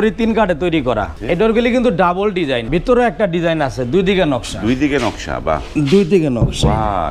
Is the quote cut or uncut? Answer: cut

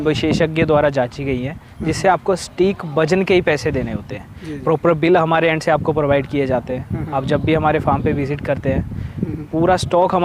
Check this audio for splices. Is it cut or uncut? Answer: uncut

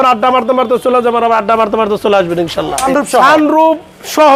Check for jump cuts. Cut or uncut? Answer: cut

